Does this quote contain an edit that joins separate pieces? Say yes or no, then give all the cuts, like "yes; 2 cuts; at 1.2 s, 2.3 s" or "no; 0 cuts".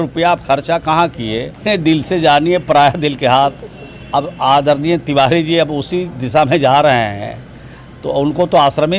yes; 1 cut; at 1.6 s